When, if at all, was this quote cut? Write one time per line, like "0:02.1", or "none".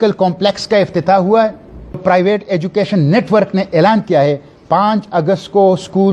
0:02.0